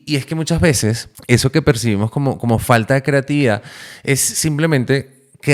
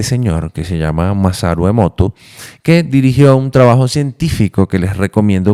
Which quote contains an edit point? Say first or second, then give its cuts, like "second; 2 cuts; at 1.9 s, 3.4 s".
first; 1 cut; at 1.1 s